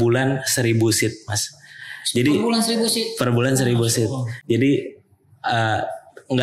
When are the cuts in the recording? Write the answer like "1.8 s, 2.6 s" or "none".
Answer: none